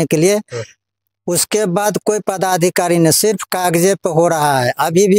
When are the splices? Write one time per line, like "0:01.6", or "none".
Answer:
none